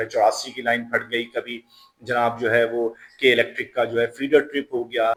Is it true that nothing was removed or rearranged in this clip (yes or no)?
yes